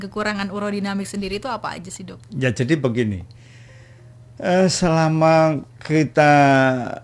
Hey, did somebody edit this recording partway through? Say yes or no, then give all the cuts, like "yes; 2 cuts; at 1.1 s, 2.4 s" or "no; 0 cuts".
no; 0 cuts